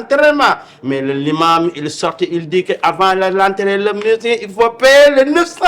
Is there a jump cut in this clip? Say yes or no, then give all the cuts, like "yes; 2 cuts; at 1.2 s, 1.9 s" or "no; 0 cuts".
no; 0 cuts